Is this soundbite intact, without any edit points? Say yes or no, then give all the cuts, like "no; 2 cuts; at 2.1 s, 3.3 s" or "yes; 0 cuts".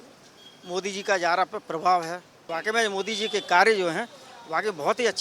no; 1 cut; at 2.5 s